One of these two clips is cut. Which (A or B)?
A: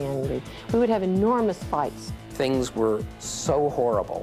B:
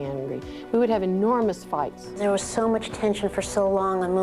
A